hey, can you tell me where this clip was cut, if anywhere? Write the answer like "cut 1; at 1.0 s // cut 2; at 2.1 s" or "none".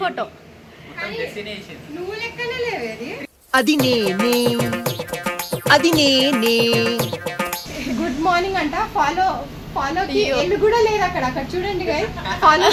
cut 1; at 7.6 s